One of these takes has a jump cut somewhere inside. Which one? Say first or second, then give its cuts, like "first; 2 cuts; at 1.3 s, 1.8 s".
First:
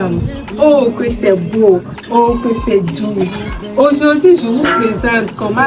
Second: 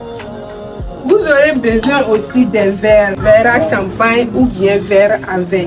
second; 1 cut; at 1.0 s